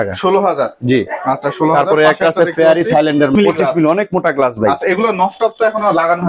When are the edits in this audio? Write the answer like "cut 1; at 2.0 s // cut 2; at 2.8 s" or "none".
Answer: cut 1; at 3.3 s